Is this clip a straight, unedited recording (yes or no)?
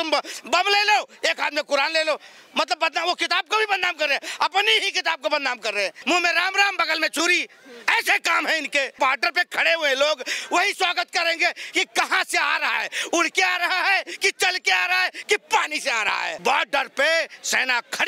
no